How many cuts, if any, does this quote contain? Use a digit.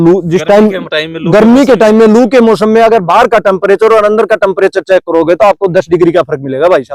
0